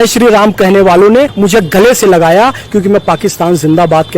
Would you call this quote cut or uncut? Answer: cut